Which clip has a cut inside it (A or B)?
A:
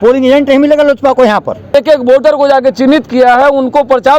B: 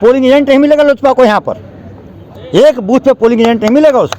A